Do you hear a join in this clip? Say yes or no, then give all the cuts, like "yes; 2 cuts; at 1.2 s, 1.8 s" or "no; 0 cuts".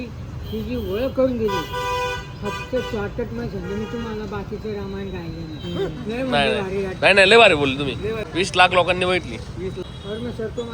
yes; 2 cuts; at 8.2 s, 9.9 s